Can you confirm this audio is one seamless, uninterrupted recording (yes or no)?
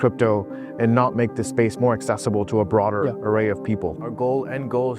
no